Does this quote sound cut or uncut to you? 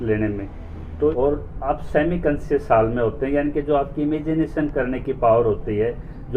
cut